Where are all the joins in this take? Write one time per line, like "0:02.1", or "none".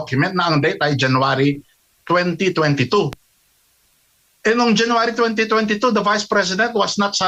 none